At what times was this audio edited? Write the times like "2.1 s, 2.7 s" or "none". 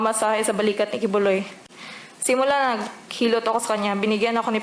1.6 s